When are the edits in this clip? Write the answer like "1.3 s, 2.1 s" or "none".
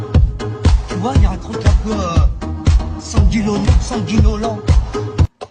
none